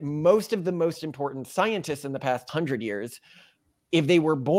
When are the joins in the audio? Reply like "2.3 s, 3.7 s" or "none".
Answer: 2.5 s